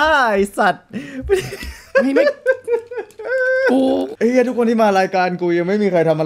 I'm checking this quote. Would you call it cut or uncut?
cut